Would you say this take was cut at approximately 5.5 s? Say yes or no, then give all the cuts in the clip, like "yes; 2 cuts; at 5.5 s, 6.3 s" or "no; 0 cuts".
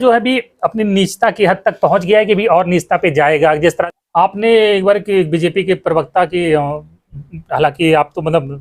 no; 1 cut; at 3.8 s